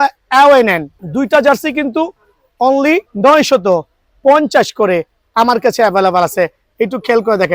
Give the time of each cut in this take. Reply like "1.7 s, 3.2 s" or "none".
0.9 s, 3.1 s